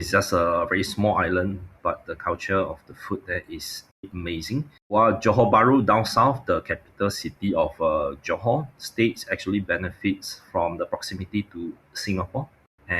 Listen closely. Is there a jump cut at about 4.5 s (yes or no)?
yes